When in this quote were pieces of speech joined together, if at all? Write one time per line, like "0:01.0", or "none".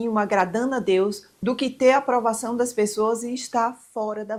none